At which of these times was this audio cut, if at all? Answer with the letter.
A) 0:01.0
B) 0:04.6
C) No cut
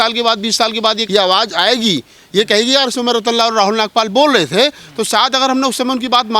A